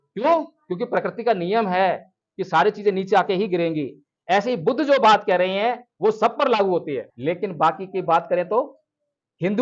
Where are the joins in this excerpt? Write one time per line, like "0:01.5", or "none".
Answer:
0:07.1